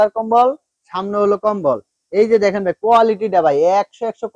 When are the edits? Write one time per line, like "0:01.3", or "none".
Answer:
none